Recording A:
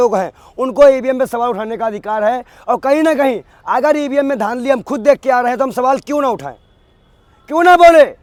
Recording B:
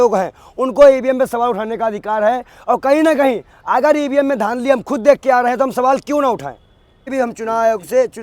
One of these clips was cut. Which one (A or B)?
B